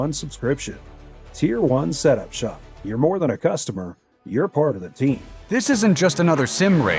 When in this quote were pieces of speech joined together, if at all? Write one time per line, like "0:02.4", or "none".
0:05.5

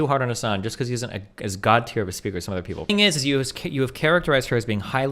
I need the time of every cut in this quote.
0:02.9

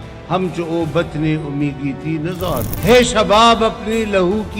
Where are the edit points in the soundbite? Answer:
0:02.7

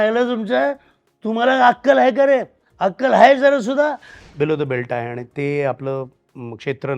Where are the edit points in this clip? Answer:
0:04.2

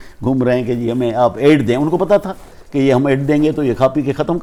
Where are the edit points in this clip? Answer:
none

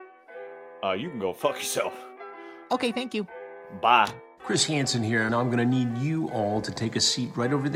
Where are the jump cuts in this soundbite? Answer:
0:04.4

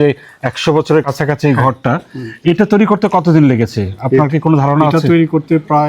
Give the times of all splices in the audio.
0:01.1

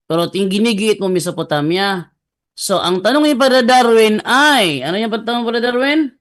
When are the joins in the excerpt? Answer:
none

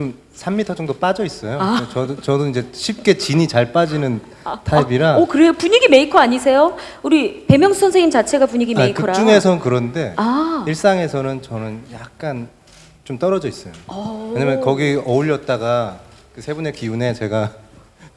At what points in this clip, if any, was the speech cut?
none

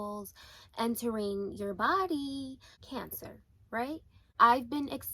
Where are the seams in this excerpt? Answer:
0:04.2

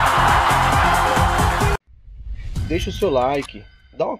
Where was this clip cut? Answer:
0:01.8

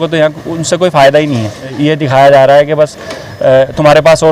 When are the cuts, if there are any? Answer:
0:01.7

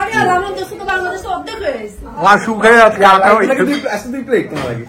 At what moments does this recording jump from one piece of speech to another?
none

